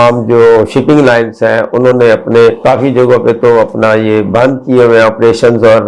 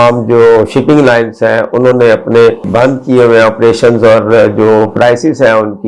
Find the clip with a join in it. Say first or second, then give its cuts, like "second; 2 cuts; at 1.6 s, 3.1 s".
second; 1 cut; at 2.6 s